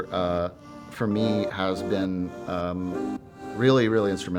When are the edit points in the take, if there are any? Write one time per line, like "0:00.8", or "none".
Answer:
none

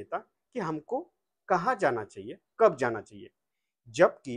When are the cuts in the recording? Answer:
none

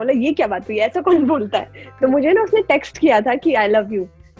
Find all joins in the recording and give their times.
none

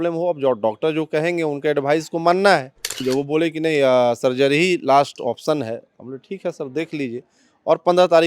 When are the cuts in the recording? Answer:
0:03.0

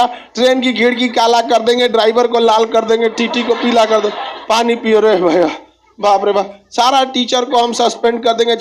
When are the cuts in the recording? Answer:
none

